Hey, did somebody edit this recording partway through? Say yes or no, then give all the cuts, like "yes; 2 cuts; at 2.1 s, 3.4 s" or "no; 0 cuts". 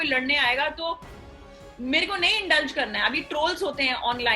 no; 0 cuts